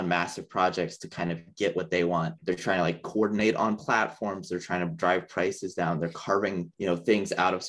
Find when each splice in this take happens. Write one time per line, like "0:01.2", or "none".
none